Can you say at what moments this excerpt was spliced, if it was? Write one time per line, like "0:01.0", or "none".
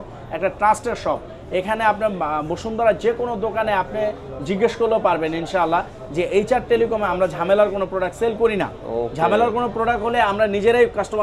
none